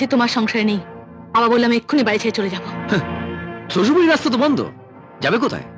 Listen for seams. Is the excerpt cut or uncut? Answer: uncut